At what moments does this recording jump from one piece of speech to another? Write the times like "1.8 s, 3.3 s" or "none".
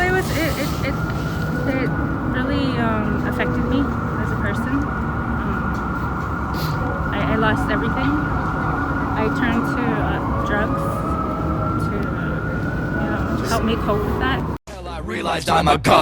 14.6 s